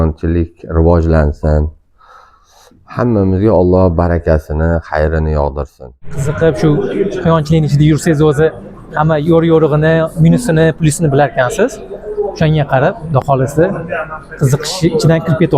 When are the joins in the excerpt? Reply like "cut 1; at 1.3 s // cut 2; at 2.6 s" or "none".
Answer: cut 1; at 6.2 s